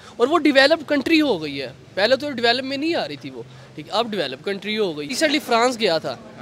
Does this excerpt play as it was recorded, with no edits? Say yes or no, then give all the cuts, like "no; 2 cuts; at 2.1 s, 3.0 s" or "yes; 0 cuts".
no; 1 cut; at 5.1 s